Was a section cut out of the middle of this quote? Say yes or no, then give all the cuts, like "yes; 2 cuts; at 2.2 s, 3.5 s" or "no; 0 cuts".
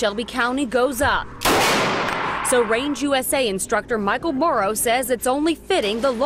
no; 0 cuts